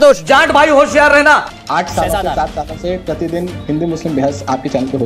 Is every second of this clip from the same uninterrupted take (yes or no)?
no